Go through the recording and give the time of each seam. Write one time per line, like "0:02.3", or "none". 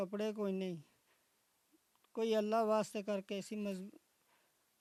none